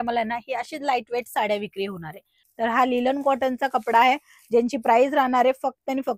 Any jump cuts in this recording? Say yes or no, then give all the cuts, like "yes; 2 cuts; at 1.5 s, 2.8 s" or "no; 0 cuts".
yes; 1 cut; at 2.4 s